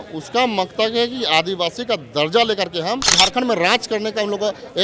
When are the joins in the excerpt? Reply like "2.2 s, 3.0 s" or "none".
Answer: 3.1 s